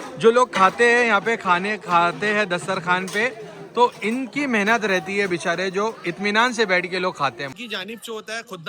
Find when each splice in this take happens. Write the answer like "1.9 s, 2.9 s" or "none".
7.5 s

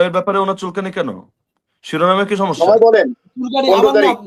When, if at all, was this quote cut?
none

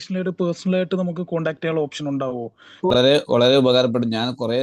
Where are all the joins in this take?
2.9 s

